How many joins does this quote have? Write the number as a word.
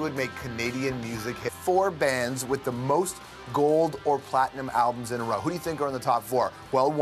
zero